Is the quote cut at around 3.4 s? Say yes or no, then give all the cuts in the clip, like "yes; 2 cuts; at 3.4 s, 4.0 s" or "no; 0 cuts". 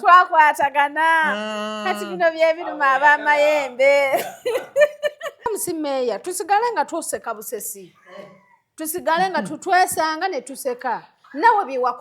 no; 1 cut; at 5.5 s